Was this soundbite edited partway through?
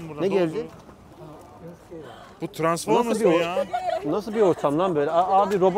no; 0 cuts

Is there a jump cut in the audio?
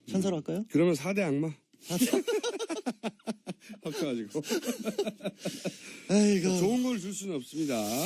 no; 0 cuts

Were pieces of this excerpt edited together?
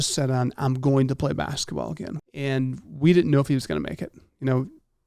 yes; 1 cut; at 2.1 s

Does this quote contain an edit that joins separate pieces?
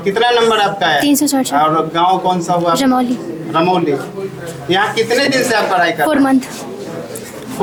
no; 0 cuts

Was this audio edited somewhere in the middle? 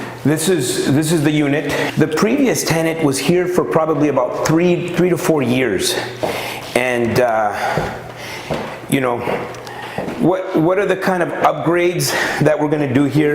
yes; 1 cut; at 1.9 s

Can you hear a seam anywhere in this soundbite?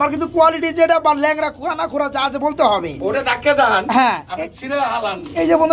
no; 0 cuts

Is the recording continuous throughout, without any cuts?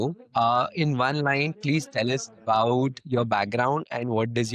yes; 0 cuts

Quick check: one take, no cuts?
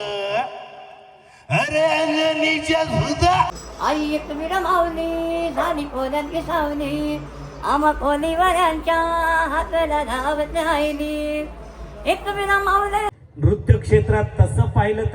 no; 2 cuts; at 3.5 s, 13.2 s

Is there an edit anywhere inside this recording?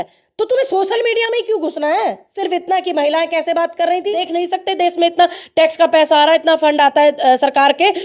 yes; 2 cuts; at 2.3 s, 4.2 s

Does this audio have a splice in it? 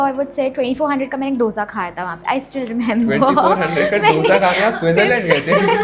no; 0 cuts

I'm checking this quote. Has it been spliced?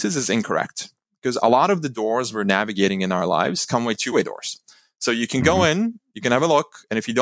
yes; 1 cut; at 4.1 s

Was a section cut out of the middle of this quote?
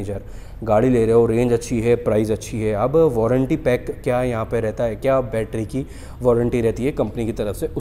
no; 0 cuts

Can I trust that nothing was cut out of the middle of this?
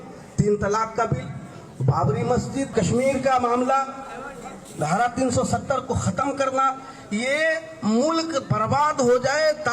no; 1 cut; at 2.7 s

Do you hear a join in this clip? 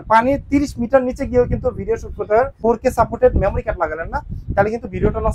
yes; 1 cut; at 2.6 s

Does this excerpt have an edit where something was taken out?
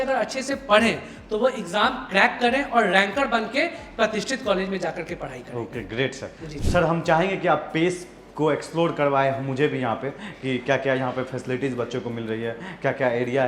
no; 0 cuts

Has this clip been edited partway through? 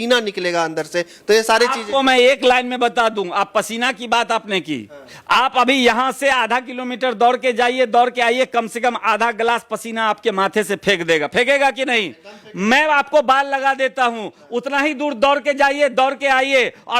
no; 0 cuts

